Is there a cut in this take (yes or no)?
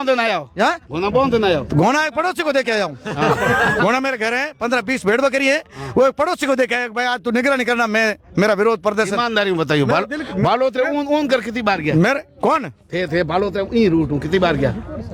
no